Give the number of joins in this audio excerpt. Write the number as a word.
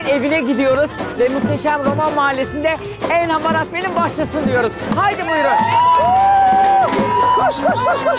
zero